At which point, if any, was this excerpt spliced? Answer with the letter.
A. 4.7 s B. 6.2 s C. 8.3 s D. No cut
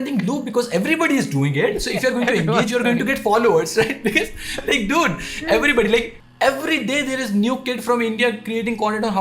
B